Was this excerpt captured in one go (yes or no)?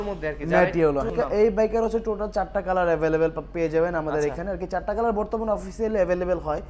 no